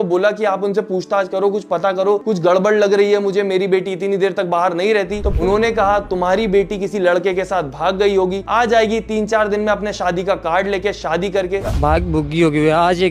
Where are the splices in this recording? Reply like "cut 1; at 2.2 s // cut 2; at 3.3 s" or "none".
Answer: cut 1; at 5.3 s // cut 2; at 11.6 s